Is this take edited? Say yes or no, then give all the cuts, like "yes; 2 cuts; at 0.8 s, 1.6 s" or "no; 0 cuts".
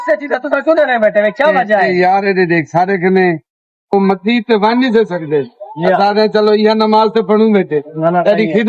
no; 0 cuts